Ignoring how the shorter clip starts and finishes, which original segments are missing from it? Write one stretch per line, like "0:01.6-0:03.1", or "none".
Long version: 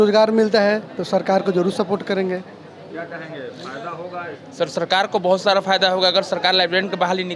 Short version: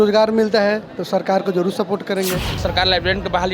0:02.6-0:06.3